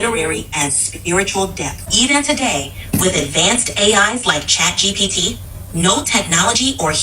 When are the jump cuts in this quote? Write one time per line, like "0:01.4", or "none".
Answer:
none